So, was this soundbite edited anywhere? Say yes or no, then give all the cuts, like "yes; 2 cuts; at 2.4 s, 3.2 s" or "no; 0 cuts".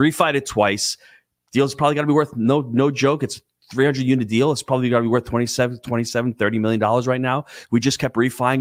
no; 0 cuts